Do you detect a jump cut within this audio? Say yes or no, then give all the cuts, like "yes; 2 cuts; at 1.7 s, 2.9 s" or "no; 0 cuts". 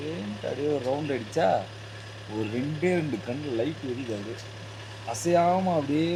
no; 0 cuts